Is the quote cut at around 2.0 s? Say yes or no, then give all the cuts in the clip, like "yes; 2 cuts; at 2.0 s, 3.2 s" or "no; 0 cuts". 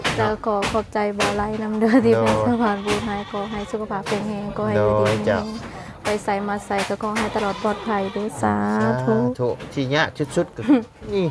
no; 0 cuts